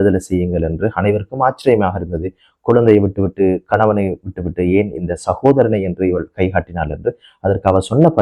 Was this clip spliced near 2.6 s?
no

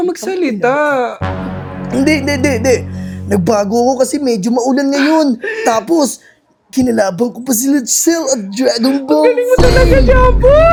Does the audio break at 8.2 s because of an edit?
no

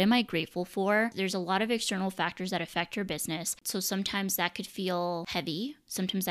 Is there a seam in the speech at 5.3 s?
yes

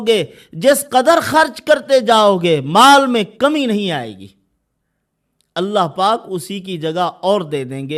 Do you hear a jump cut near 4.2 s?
no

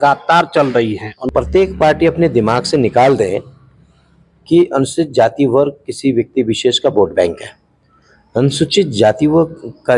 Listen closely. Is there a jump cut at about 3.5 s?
no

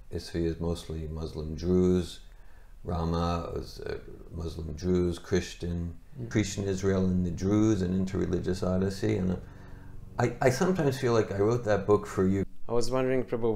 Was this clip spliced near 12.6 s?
yes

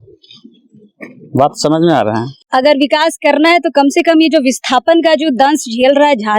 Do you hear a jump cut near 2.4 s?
yes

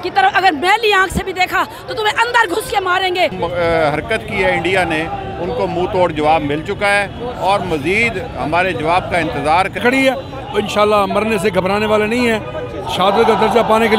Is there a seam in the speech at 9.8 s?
yes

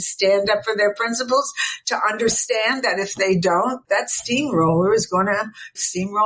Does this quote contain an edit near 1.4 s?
no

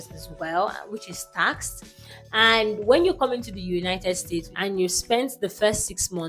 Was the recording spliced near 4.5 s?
yes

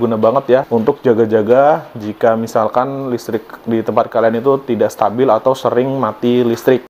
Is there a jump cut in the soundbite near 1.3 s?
no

